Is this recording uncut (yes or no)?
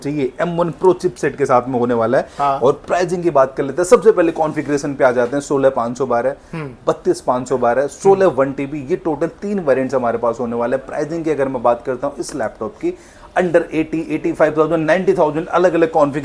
yes